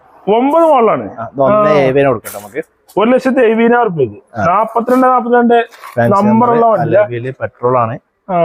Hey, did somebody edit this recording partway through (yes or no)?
no